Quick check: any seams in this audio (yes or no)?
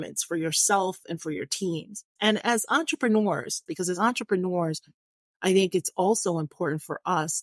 yes